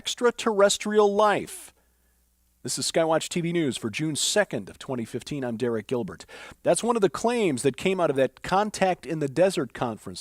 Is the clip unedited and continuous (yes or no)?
no